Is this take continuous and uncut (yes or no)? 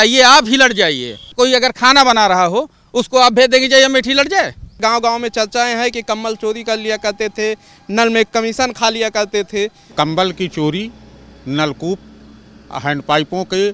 no